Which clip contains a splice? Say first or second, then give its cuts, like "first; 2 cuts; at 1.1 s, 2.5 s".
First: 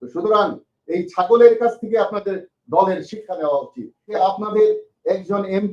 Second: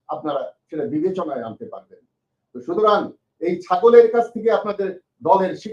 first; 1 cut; at 4.2 s